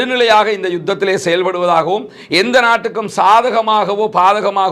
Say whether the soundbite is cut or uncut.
uncut